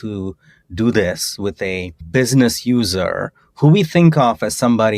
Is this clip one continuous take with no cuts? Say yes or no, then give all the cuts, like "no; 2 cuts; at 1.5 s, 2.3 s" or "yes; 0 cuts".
no; 1 cut; at 2.0 s